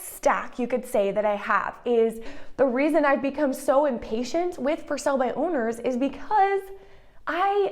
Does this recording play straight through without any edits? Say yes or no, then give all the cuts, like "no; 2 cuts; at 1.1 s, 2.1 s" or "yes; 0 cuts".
no; 1 cut; at 2.3 s